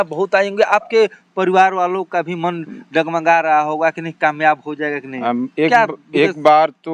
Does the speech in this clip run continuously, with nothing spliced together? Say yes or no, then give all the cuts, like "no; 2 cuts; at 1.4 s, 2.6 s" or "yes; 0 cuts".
yes; 0 cuts